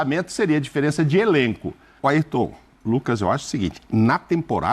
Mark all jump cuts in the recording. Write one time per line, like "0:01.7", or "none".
0:01.8

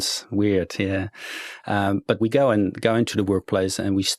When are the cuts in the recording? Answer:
none

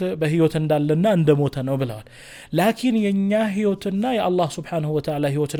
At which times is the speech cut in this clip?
none

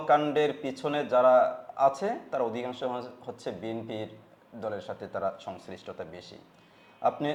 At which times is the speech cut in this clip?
none

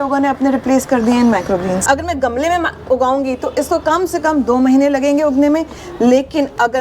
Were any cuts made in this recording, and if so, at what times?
0:01.8

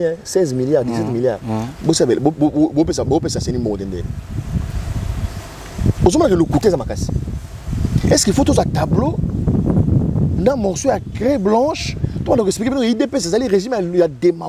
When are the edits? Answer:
none

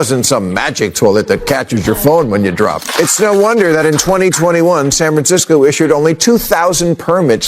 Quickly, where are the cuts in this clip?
0:02.8

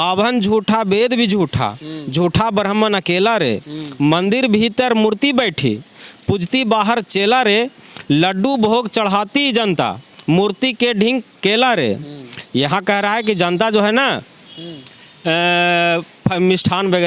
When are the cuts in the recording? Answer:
none

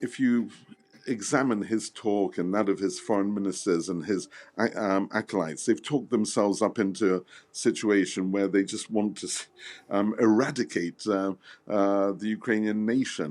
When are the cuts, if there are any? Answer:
none

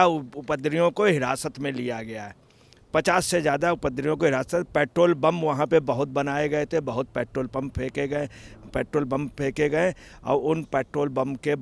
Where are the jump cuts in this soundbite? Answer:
none

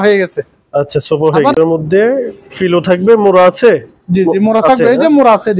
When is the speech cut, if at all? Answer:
0:01.6

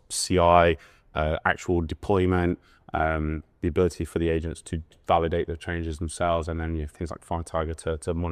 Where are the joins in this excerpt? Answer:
none

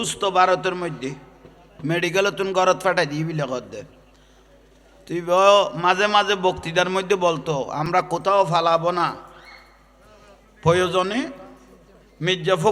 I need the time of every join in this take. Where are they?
0:07.9

